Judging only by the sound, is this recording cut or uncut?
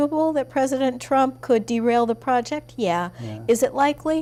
uncut